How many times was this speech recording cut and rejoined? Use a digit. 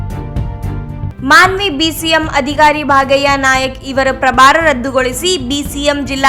1